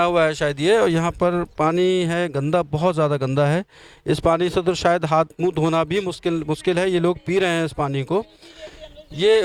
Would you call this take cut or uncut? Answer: uncut